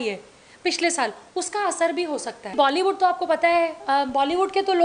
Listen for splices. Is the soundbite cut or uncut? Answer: cut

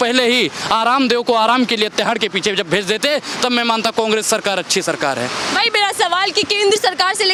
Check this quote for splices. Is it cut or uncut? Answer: uncut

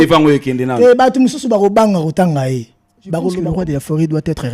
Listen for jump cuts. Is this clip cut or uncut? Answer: cut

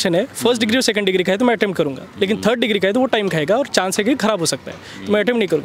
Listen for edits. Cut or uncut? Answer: uncut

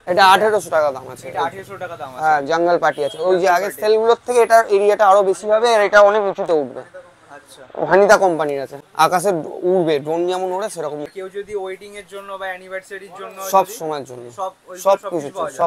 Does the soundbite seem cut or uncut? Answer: cut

